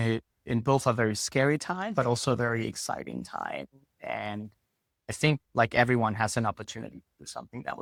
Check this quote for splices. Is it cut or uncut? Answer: uncut